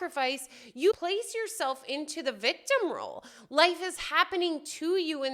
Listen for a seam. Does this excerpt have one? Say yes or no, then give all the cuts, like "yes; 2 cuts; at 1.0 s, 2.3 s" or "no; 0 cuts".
yes; 1 cut; at 0.9 s